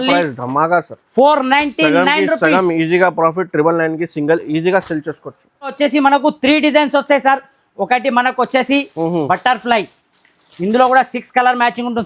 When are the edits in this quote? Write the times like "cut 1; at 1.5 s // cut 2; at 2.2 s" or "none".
cut 1; at 5.7 s